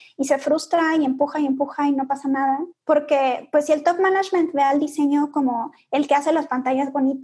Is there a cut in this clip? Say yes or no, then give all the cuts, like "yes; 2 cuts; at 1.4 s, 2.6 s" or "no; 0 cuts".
yes; 1 cut; at 2.7 s